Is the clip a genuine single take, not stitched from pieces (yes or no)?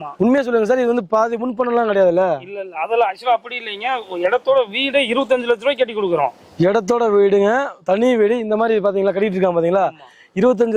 yes